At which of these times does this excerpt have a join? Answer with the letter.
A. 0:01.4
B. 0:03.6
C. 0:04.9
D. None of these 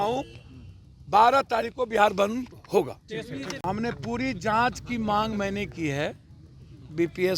B